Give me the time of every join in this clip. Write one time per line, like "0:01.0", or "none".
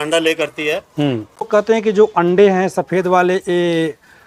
0:01.5